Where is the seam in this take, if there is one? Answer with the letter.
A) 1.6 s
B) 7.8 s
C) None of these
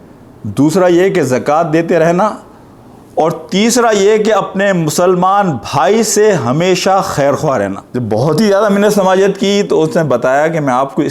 B